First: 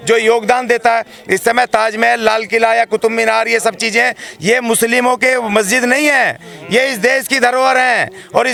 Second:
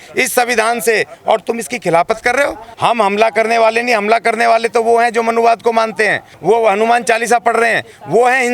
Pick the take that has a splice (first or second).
second